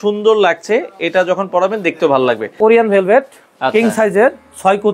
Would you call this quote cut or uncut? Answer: cut